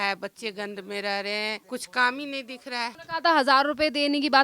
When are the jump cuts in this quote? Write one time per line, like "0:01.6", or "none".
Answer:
0:01.6
0:03.0